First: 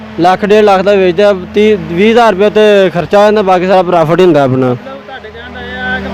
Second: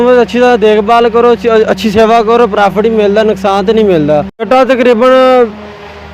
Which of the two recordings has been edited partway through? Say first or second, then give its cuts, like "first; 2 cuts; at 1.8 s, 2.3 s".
second; 1 cut; at 4.5 s